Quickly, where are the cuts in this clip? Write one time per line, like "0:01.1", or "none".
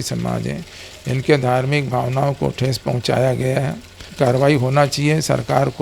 0:04.0